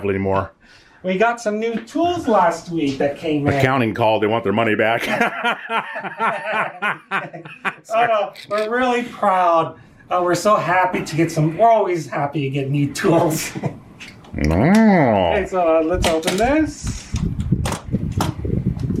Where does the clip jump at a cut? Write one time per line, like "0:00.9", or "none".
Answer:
none